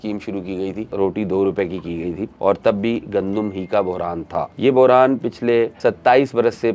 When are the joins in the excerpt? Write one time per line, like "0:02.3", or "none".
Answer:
0:00.9
0:02.3
0:04.5
0:05.7